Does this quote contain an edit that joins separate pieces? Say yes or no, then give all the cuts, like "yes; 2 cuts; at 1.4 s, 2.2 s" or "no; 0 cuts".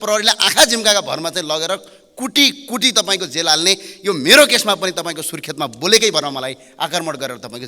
no; 0 cuts